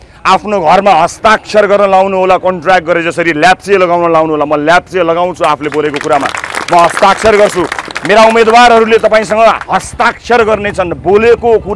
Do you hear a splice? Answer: no; 0 cuts

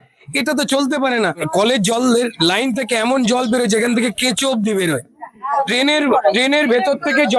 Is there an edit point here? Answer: yes; 1 cut; at 1.5 s

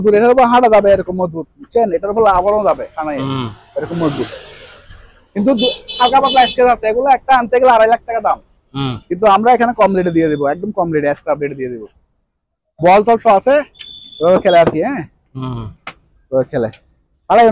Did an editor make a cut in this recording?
no; 0 cuts

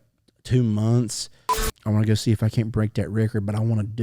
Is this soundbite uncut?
no; 1 cut; at 1.7 s

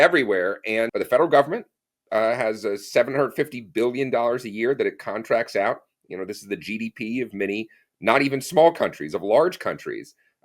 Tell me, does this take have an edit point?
yes; 1 cut; at 0.9 s

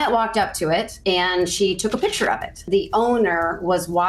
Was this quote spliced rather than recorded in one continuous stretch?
yes; 2 cuts; at 0.9 s, 2.6 s

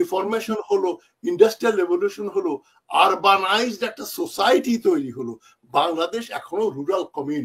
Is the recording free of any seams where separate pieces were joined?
yes; 0 cuts

